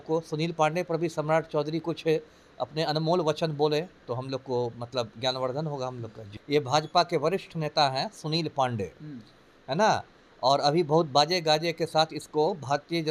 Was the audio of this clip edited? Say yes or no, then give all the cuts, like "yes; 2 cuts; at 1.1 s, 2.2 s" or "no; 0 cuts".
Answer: yes; 1 cut; at 6.3 s